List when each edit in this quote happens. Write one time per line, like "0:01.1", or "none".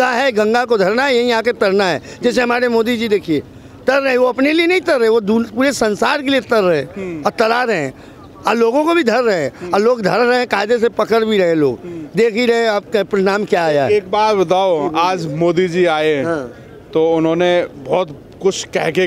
none